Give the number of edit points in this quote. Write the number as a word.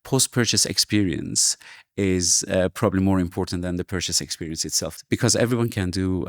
zero